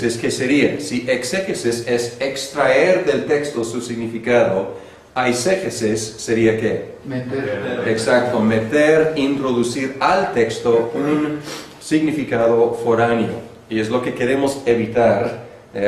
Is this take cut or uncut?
cut